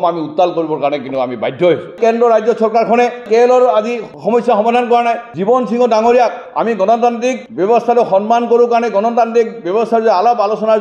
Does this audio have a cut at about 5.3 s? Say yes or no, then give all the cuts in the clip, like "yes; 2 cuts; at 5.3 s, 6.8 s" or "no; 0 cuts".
no; 0 cuts